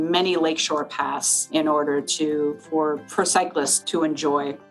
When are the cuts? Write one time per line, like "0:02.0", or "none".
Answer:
0:01.5
0:03.1
0:03.8

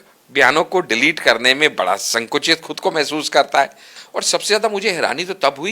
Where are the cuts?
0:04.0

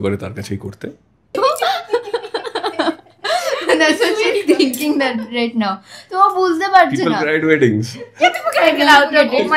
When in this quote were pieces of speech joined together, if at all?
0:01.3

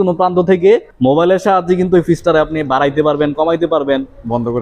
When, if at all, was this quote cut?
0:00.9

